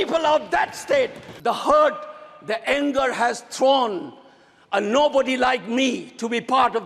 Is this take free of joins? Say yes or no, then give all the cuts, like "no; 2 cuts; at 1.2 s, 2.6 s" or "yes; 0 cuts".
no; 1 cut; at 1.2 s